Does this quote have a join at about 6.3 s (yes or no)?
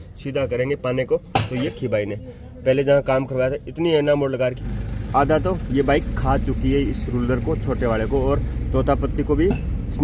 no